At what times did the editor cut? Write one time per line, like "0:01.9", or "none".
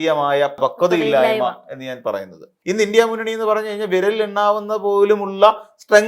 0:02.5